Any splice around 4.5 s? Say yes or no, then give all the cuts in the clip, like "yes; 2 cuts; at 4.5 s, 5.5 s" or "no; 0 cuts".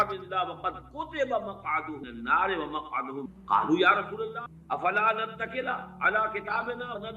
yes; 1 cut; at 4.5 s